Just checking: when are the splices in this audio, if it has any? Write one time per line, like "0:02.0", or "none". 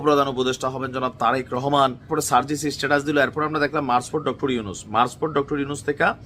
0:02.1